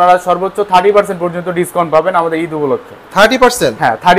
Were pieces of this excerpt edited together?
no; 0 cuts

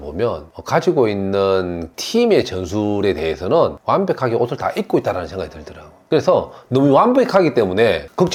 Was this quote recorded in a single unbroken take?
yes; 0 cuts

